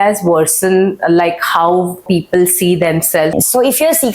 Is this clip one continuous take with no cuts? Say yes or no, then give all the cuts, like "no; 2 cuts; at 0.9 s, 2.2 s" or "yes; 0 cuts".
no; 2 cuts; at 2.0 s, 3.3 s